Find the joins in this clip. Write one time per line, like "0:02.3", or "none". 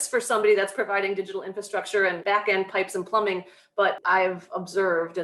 0:02.2
0:04.0